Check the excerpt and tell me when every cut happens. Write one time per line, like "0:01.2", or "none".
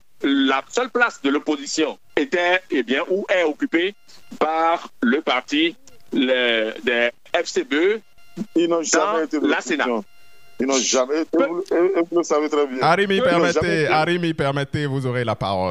0:07.2
0:08.1